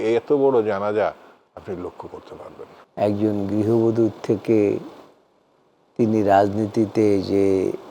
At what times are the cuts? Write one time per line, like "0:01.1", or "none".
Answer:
0:02.8